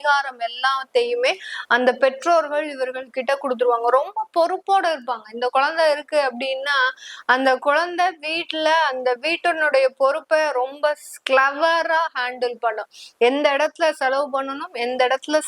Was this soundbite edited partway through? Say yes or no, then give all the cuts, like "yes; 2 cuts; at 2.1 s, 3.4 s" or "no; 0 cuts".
no; 0 cuts